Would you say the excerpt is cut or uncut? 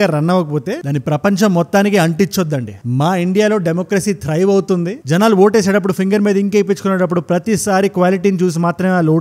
uncut